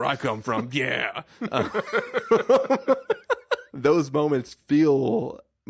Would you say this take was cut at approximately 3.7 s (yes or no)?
yes